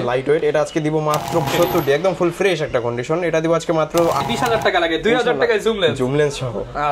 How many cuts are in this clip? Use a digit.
2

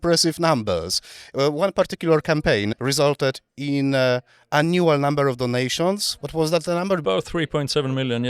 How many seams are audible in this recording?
2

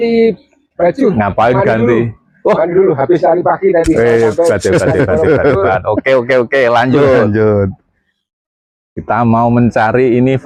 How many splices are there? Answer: 0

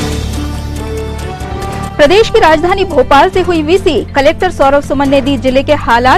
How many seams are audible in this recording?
1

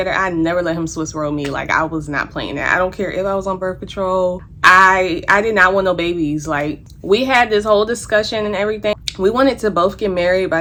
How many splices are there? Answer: 0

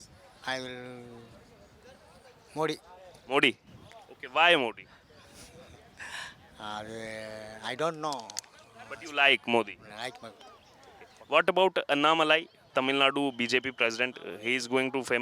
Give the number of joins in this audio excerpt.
0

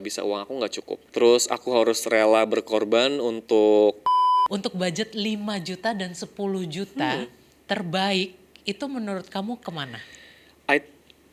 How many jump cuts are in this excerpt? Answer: 2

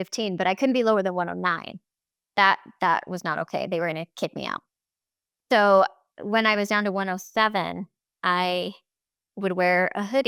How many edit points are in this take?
0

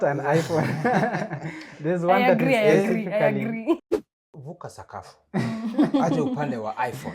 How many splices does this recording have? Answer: 1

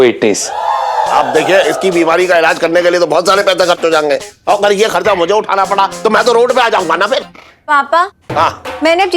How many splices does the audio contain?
3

